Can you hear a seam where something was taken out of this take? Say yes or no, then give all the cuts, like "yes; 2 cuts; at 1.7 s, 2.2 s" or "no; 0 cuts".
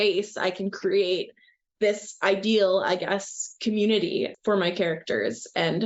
no; 0 cuts